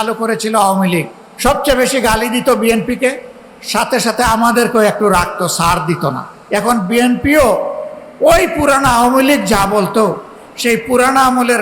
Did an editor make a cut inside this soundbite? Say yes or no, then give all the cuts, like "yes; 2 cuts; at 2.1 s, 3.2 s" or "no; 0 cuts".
yes; 2 cuts; at 1.2 s, 6.3 s